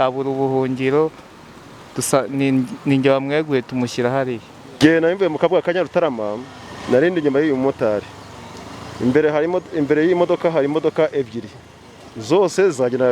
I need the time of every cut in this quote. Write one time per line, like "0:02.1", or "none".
0:04.8